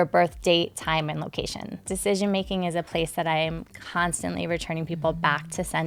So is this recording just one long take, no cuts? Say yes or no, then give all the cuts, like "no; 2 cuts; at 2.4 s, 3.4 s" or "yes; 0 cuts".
no; 1 cut; at 1.9 s